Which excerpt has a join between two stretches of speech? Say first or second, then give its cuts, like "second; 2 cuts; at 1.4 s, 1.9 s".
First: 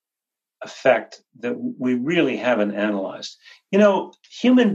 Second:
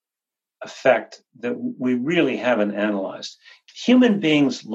second; 1 cut; at 3.6 s